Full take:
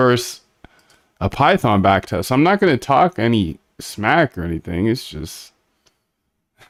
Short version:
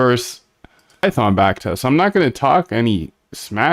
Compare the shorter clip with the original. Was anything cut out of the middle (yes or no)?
yes